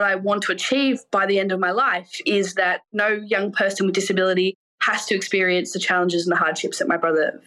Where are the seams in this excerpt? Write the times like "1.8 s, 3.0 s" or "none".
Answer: 1.0 s, 2.9 s